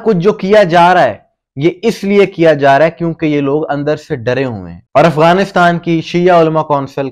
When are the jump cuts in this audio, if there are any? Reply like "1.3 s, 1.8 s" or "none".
4.9 s